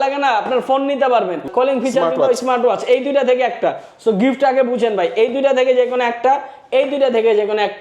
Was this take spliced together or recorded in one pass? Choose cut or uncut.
cut